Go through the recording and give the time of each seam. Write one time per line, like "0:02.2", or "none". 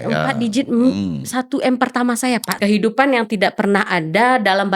0:02.5